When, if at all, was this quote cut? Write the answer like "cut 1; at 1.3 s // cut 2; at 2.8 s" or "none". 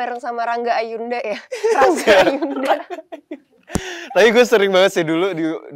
none